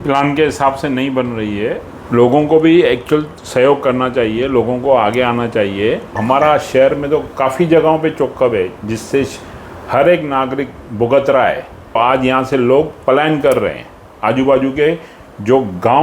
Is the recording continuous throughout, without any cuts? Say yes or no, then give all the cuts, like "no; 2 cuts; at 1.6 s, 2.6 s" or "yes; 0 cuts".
no; 3 cuts; at 1.9 s, 6.2 s, 12.0 s